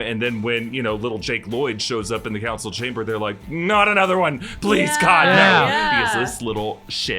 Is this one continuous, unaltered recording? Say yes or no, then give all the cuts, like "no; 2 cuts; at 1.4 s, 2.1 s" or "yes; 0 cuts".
no; 1 cut; at 6.3 s